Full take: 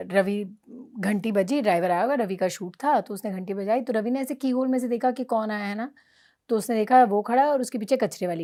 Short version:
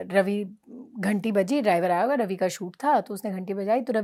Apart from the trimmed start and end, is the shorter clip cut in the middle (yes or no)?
no